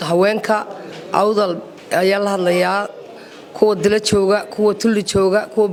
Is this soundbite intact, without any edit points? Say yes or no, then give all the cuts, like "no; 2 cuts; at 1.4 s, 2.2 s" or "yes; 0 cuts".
yes; 0 cuts